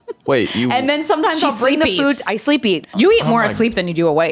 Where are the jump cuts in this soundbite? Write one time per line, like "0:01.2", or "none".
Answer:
0:02.9